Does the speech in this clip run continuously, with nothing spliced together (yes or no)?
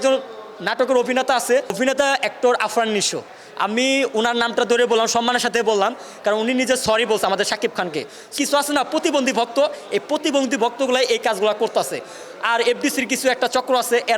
no